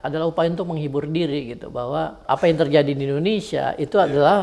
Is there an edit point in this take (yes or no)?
yes